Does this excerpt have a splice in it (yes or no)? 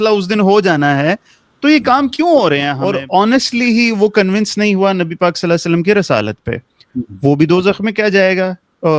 yes